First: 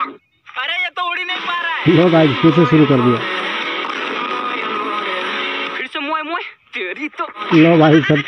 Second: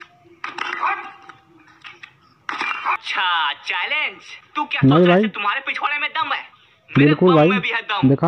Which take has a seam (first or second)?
second